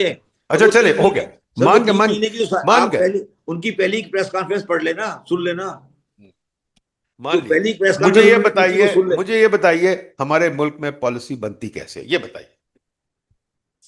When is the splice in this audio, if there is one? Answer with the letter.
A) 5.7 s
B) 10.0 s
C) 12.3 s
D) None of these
D